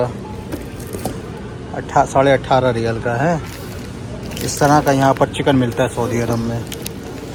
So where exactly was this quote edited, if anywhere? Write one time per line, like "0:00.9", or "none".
none